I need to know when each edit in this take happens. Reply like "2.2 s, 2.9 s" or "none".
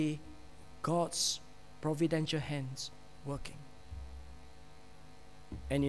none